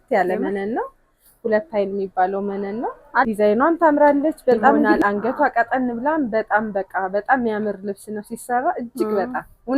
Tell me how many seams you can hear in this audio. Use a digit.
2